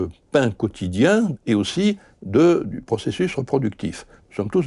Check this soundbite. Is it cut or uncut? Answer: cut